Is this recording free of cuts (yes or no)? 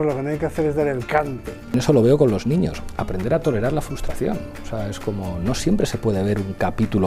no